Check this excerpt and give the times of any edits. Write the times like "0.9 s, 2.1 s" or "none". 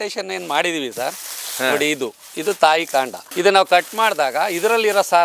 3.2 s